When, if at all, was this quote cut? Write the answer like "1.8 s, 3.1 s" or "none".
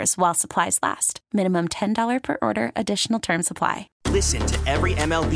3.9 s